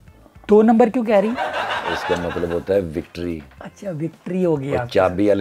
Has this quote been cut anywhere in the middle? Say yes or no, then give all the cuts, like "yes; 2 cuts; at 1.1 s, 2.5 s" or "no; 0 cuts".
no; 0 cuts